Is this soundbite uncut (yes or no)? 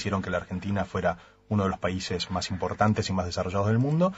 no